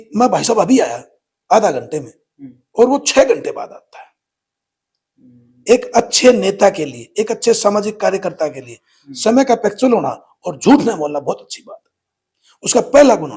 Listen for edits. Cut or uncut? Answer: uncut